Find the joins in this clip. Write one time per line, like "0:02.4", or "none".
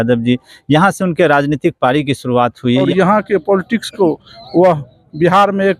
0:02.9